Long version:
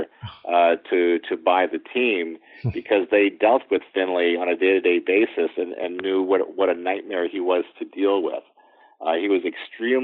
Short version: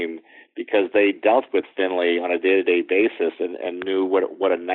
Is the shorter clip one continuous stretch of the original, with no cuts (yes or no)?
yes